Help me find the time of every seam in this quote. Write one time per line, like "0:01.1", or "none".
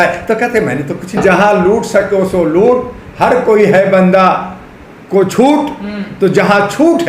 0:01.2